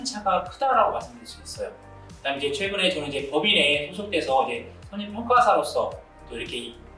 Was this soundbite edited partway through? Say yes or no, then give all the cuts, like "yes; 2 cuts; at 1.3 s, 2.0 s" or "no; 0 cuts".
no; 0 cuts